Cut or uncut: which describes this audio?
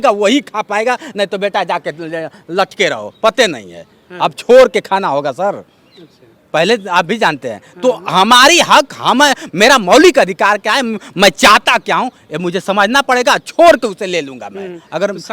uncut